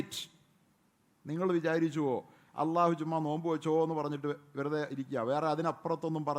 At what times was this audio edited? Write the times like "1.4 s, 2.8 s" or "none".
none